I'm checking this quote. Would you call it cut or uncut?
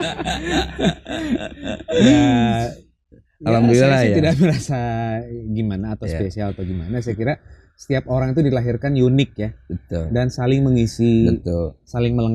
uncut